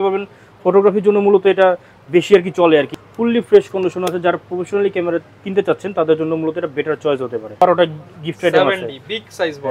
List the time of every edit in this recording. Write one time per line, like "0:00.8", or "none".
0:02.9
0:07.6